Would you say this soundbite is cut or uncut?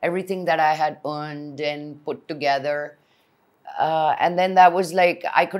uncut